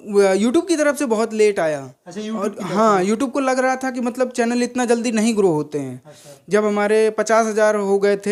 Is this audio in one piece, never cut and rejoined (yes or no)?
yes